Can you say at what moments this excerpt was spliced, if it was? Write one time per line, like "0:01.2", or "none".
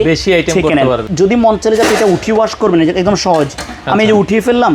0:01.1